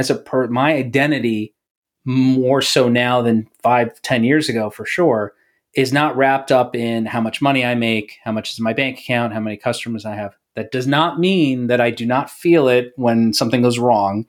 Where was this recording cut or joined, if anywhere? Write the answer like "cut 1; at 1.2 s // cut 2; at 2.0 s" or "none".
none